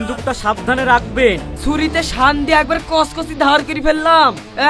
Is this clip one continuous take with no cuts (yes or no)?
no